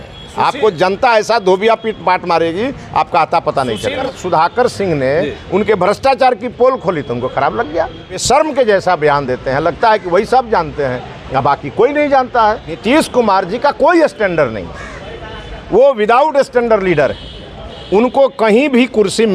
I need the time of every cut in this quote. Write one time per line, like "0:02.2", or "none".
0:04.1
0:08.2
0:12.8